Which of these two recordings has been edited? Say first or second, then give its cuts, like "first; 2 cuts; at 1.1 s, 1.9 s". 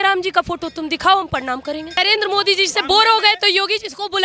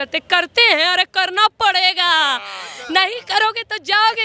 first; 1 cut; at 1.9 s